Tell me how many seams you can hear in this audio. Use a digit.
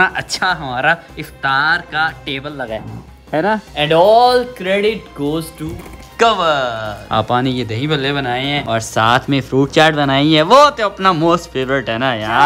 2